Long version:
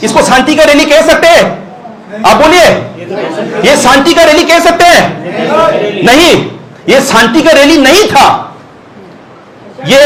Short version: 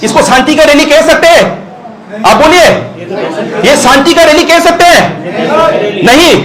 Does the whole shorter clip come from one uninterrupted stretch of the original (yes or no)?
yes